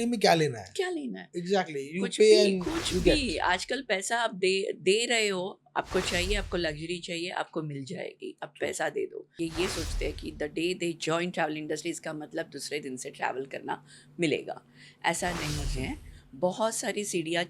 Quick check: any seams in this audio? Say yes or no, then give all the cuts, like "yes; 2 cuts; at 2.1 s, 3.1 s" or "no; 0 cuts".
yes; 1 cut; at 9.3 s